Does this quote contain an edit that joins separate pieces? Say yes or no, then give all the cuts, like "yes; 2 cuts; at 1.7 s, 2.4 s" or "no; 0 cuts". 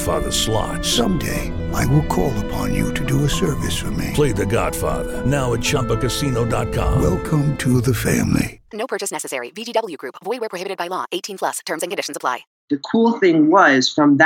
yes; 1 cut; at 12.5 s